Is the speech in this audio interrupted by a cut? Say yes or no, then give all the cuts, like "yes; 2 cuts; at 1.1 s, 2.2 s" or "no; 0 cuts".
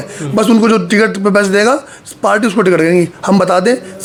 no; 0 cuts